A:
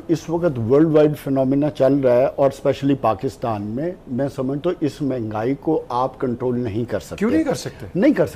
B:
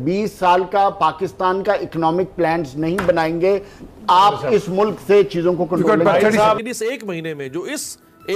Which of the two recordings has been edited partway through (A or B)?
B